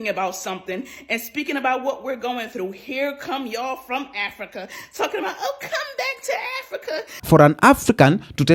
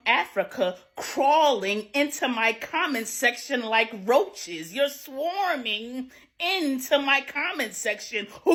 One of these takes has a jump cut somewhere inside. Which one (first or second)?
first